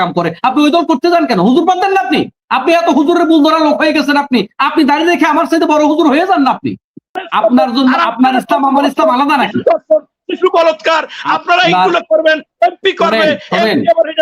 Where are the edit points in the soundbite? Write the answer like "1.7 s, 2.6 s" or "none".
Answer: 7.2 s